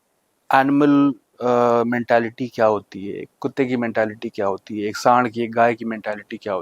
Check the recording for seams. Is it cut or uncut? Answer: uncut